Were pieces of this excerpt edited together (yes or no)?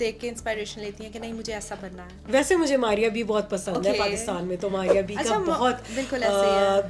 no